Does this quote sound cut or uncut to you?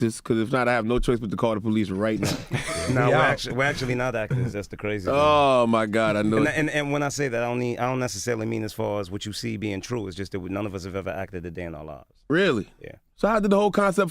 cut